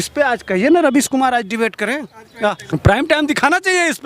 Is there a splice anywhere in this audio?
yes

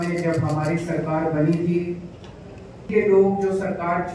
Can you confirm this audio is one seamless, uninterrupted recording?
no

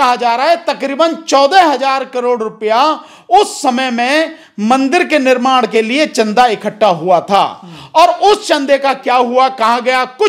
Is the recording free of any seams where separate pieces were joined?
yes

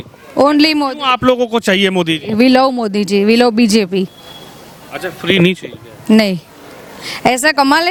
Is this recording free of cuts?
yes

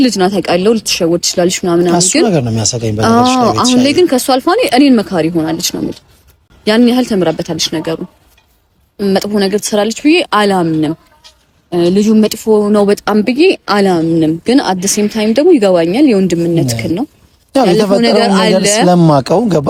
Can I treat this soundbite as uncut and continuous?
yes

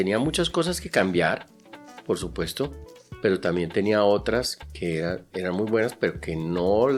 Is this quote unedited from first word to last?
yes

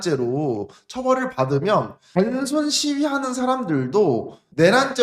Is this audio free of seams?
yes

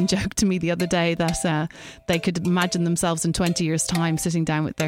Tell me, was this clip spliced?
no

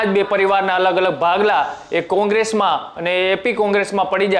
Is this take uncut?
yes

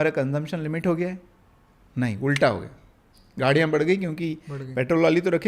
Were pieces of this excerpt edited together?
no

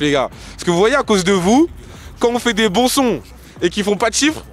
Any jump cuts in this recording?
no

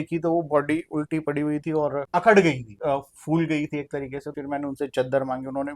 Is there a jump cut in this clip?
yes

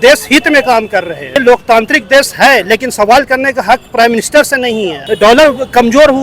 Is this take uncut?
no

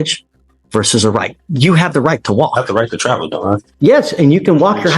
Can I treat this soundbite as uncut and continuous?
no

